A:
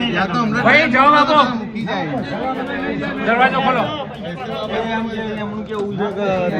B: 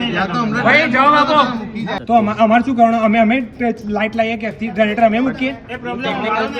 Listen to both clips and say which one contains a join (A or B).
B